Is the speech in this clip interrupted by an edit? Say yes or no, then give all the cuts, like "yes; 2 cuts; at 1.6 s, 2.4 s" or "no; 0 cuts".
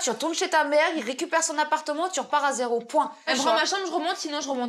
yes; 1 cut; at 3.3 s